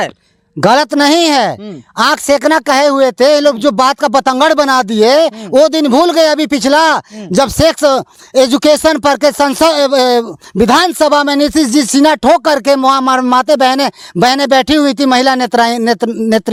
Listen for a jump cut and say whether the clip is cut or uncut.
uncut